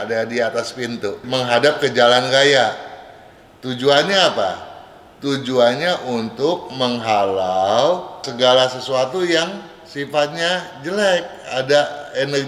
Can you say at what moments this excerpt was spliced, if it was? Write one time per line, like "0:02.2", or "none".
0:01.2
0:08.3

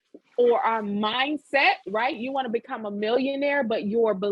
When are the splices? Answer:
none

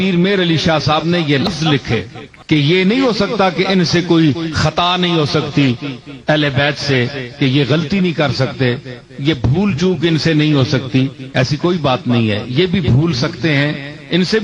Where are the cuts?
0:01.5

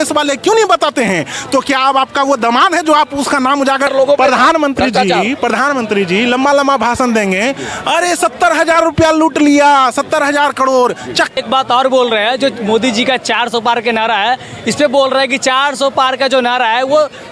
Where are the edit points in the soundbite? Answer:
0:03.9
0:11.3

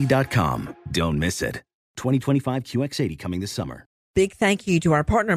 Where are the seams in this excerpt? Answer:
0:04.0

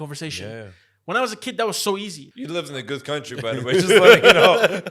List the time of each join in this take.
0:02.3

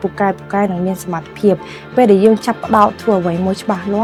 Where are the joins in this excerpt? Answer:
none

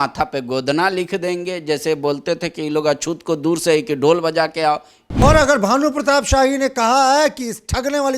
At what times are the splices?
0:05.1

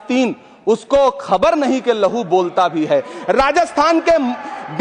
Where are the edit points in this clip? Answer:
none

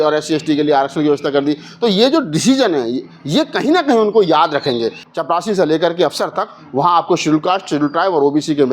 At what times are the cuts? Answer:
0:05.0

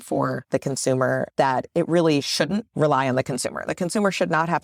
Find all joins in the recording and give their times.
none

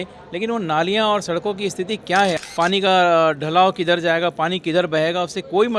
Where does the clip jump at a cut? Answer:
0:02.4

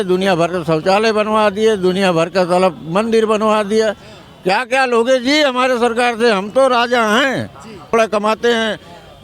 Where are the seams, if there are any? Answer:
0:07.9

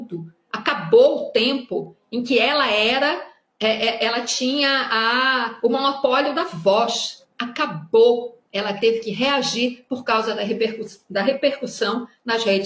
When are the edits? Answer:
none

